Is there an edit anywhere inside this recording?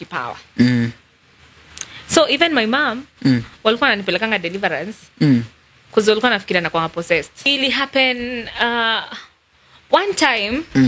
yes; 1 cut; at 7.5 s

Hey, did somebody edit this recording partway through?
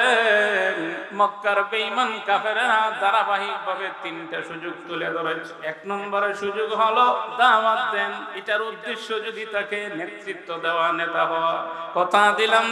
yes; 4 cuts; at 1.0 s, 5.5 s, 7.3 s, 8.3 s

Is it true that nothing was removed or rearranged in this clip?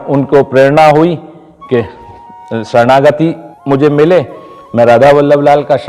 no; 1 cut; at 3.5 s

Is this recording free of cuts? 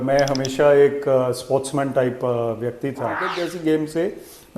no; 1 cut; at 2.8 s

